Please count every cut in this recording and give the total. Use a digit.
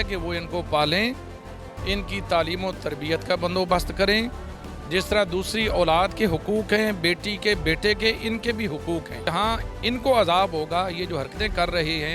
1